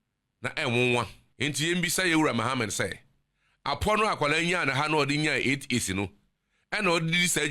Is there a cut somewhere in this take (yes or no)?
yes